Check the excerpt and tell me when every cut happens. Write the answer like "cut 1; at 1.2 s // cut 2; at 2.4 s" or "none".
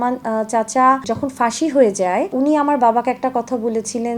cut 1; at 1.0 s // cut 2; at 2.3 s